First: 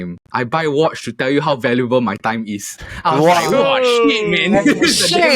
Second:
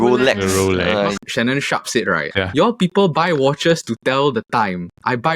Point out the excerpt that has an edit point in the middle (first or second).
second